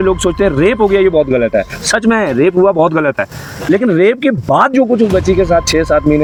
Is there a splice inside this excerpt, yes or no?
no